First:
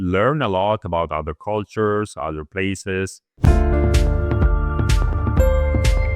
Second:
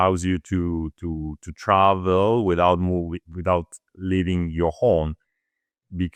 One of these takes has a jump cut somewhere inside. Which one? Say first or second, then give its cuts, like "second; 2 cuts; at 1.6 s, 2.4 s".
first; 1 cut; at 3.2 s